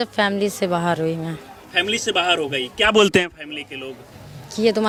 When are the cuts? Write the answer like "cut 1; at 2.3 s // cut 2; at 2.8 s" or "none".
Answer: none